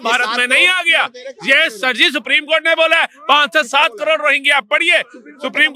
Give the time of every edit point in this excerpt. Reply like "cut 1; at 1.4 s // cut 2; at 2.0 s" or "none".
none